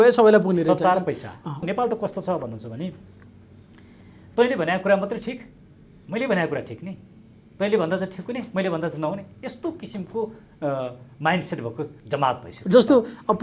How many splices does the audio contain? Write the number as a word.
one